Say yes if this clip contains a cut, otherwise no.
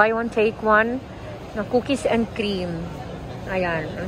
no